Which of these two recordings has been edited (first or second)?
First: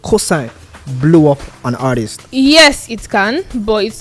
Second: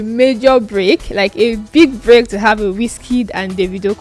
first